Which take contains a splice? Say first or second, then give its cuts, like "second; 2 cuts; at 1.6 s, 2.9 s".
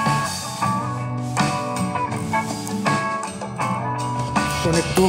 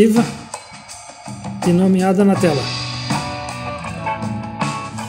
first; 1 cut; at 4.0 s